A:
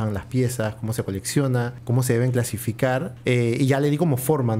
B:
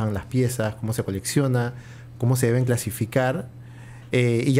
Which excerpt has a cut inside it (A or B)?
A